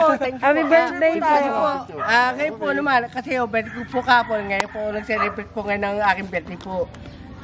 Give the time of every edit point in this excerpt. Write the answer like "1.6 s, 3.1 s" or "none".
none